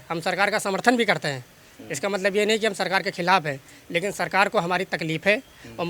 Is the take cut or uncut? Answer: uncut